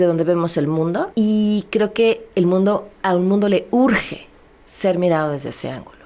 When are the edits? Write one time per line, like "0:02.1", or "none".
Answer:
0:01.1